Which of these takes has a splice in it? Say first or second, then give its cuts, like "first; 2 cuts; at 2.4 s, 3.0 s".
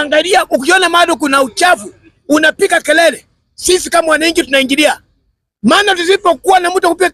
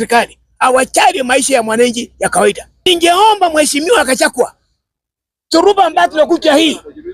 second; 1 cut; at 2.8 s